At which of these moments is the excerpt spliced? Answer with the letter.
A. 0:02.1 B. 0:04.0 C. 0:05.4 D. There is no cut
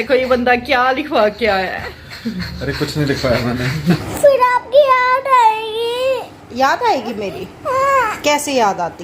B